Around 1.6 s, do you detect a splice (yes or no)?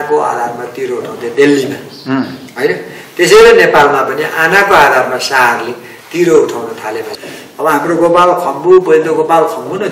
no